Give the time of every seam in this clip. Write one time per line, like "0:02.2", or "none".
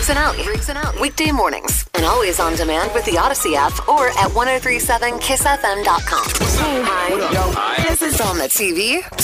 0:06.3

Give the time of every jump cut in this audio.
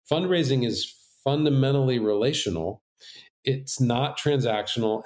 0:03.3

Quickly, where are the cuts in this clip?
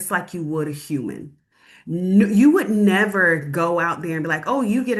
none

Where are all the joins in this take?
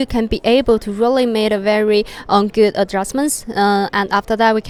none

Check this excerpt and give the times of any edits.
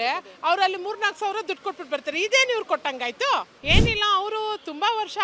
0:03.5

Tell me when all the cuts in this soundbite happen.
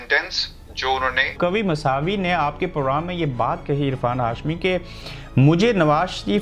0:01.4

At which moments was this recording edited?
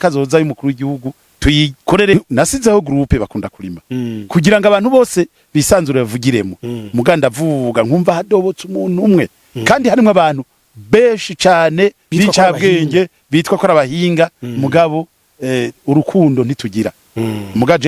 0:02.1

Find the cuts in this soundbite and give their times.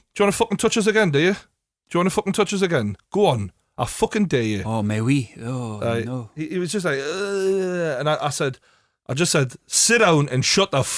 none

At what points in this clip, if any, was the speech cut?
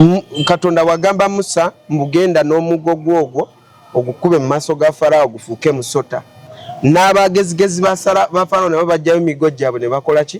none

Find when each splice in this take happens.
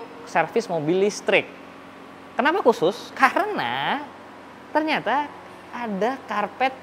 none

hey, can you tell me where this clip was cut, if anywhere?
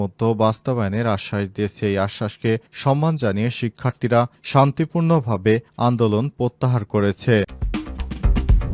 0:07.6

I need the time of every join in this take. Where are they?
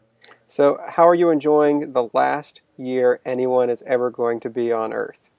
none

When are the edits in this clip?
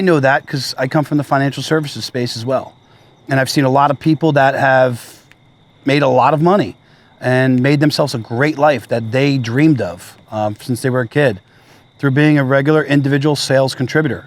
none

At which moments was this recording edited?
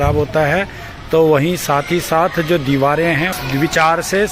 0:03.3

